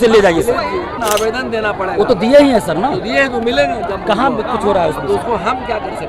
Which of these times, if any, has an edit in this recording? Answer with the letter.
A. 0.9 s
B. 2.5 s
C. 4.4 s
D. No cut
A